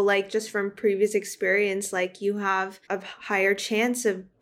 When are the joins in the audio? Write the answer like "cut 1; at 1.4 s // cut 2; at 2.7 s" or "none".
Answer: cut 1; at 2.8 s